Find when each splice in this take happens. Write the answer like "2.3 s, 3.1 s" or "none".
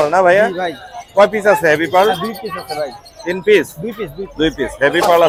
none